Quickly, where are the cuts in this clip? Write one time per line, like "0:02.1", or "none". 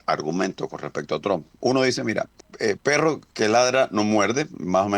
0:02.4